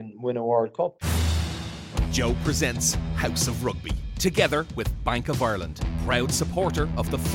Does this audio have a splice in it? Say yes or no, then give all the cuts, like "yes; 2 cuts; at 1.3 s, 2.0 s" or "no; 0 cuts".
yes; 1 cut; at 1.0 s